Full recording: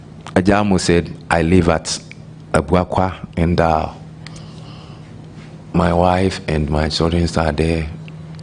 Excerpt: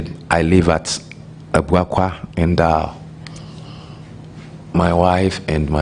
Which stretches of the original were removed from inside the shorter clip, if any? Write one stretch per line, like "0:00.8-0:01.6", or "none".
none

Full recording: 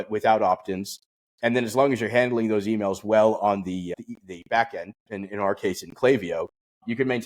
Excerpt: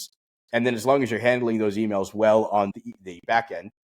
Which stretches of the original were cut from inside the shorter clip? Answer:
0:03.7-0:04.0

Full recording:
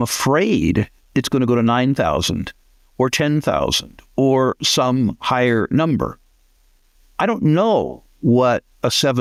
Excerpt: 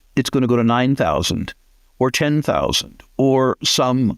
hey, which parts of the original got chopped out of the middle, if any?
none

